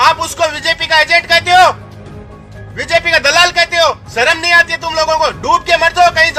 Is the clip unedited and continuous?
yes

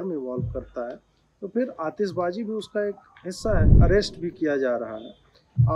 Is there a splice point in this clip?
yes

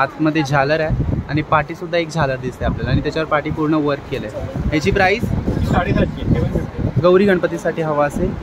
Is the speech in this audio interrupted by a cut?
yes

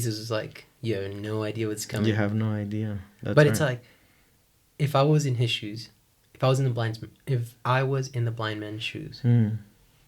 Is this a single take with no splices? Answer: yes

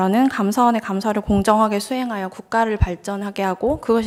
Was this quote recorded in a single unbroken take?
yes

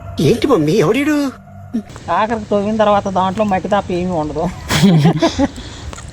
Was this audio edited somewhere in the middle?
yes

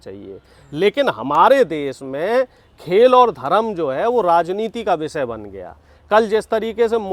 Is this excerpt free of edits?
yes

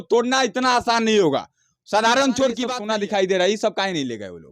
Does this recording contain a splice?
yes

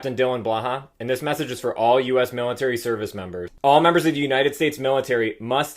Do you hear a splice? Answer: yes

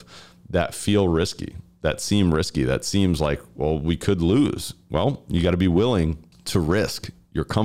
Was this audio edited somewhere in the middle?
no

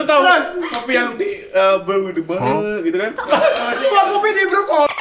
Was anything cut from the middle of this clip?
no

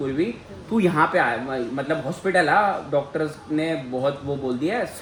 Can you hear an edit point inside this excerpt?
no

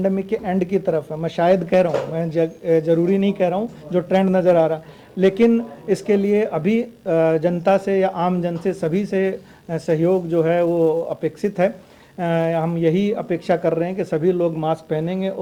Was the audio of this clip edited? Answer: no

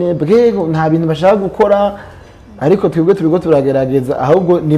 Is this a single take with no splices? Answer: yes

